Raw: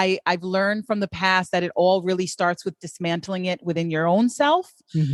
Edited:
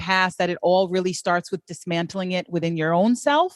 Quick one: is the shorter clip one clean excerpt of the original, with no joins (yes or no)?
yes